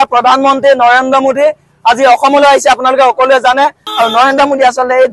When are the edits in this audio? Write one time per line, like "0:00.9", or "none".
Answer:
0:03.8